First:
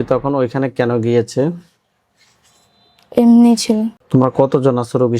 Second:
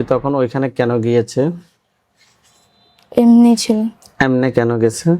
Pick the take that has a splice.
first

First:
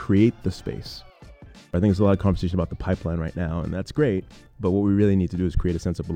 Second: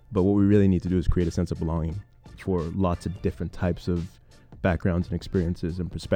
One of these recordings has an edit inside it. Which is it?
first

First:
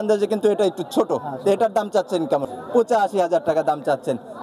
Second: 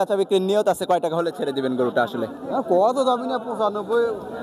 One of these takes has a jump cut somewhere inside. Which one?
first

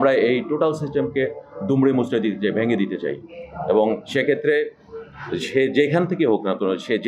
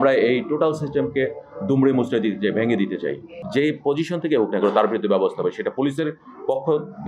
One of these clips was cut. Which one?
second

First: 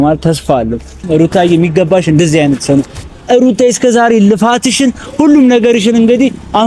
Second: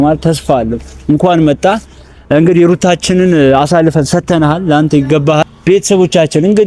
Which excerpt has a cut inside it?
first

